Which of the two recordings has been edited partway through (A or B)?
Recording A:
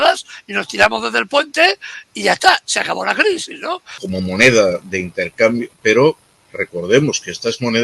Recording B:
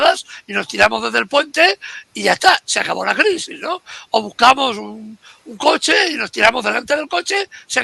A